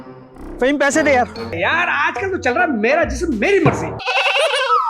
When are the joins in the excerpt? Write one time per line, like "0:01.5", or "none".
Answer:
0:01.5
0:04.0